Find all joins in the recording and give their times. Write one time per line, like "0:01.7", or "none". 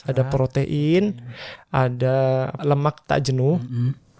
0:02.5